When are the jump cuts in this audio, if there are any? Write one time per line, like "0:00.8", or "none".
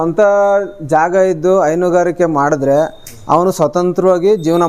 none